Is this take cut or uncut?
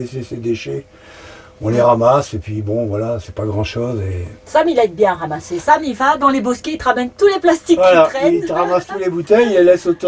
uncut